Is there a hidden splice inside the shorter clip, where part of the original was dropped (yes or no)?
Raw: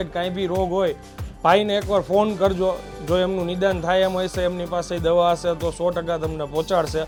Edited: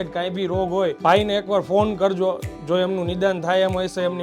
yes